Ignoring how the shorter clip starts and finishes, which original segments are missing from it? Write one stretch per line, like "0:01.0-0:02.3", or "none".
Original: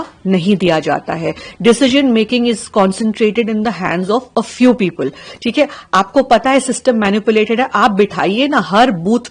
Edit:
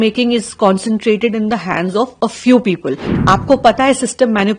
0:05.3-0:05.8